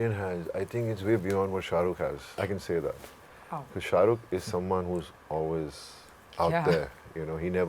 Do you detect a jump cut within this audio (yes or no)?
yes